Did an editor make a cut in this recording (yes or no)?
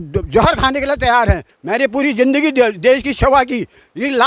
yes